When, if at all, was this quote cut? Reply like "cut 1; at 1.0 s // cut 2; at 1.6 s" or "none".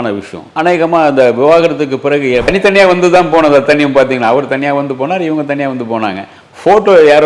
cut 1; at 2.5 s